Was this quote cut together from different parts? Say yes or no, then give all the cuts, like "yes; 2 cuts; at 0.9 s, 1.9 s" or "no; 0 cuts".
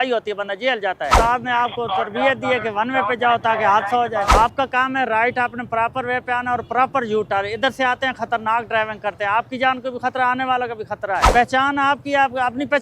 yes; 3 cuts; at 1.1 s, 4.4 s, 11.3 s